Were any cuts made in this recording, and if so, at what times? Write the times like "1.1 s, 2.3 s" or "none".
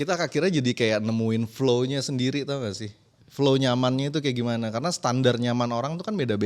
none

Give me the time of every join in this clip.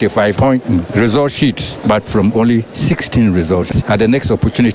3.7 s

